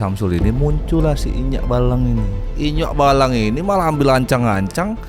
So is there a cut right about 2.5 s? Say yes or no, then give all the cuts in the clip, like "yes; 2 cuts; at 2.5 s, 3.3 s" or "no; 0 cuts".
yes; 1 cut; at 2.5 s